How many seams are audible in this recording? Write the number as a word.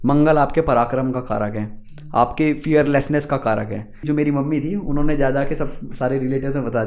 one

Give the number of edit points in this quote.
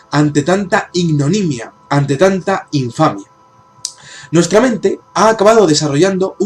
one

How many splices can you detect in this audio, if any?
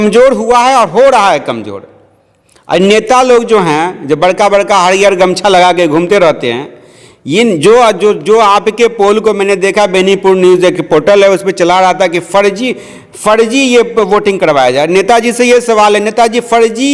zero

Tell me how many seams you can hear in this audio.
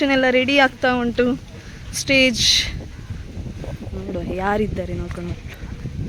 zero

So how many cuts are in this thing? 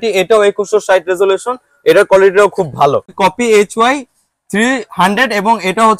one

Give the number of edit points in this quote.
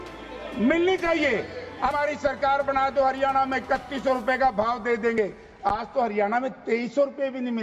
one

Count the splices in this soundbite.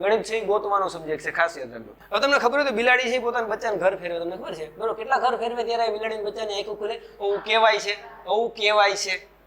one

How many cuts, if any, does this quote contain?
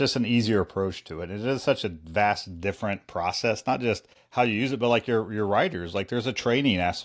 one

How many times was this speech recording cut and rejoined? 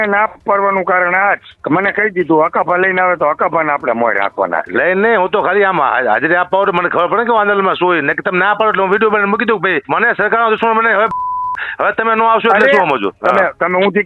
three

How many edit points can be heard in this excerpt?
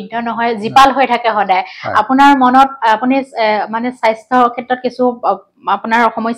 zero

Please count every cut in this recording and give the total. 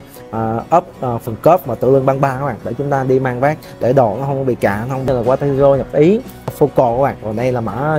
two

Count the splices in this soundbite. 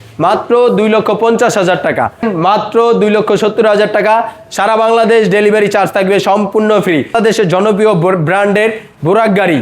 two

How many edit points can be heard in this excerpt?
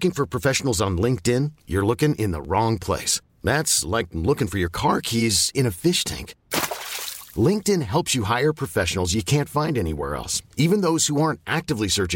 zero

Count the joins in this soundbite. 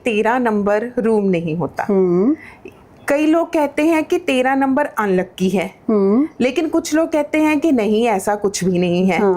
zero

